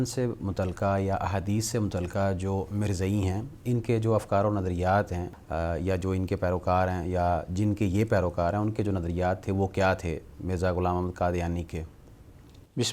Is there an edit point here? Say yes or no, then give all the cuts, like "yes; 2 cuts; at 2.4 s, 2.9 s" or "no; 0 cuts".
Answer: no; 0 cuts